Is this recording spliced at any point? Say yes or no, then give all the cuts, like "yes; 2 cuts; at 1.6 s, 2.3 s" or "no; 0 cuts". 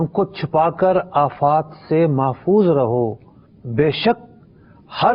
no; 0 cuts